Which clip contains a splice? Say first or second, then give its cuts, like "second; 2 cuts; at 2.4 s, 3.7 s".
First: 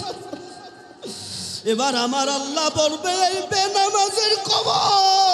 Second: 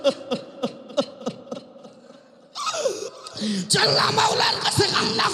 second; 1 cut; at 3.1 s